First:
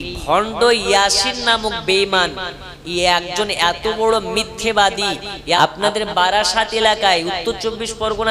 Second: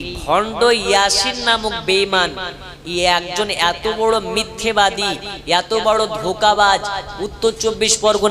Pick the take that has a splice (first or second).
first